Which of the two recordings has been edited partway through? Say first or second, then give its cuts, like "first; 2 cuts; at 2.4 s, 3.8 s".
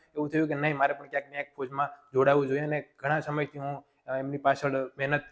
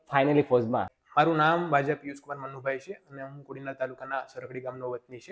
second; 1 cut; at 1.0 s